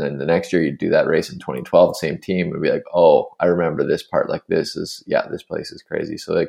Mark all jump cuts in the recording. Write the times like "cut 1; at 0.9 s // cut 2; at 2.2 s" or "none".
none